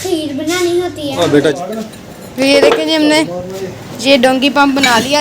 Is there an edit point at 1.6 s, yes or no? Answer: yes